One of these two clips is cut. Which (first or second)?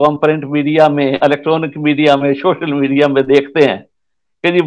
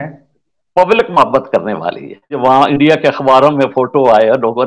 second